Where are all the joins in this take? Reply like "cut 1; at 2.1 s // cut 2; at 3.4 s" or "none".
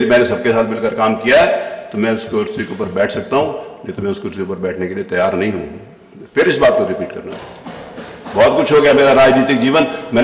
none

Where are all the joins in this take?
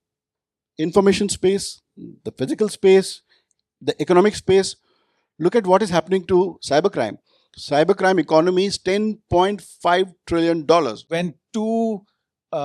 cut 1; at 11.1 s

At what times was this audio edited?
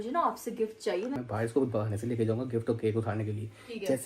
cut 1; at 1.2 s

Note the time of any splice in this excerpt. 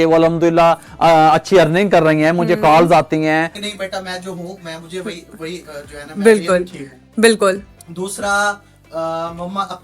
cut 1; at 3.6 s

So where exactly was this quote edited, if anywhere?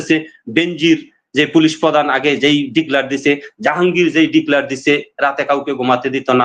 none

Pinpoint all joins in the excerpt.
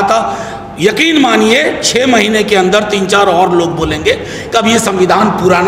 none

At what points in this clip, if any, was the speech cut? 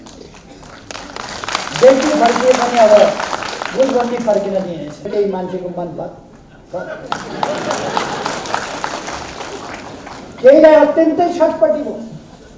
cut 1; at 5.1 s

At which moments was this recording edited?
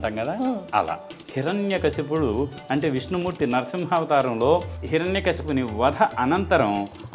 cut 1; at 1.2 s // cut 2; at 4.8 s

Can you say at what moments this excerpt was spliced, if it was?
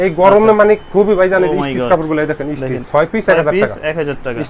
cut 1; at 2.8 s

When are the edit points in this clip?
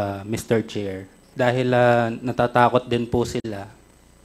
none

